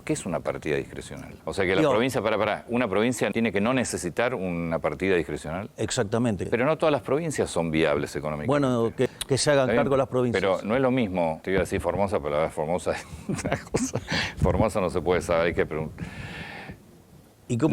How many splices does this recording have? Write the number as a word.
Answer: five